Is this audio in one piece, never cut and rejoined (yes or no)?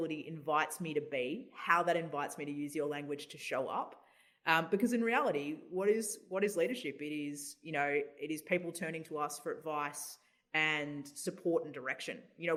yes